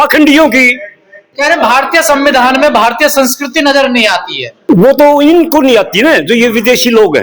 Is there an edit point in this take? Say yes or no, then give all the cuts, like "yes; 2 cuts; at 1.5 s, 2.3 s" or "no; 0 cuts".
yes; 1 cut; at 1.3 s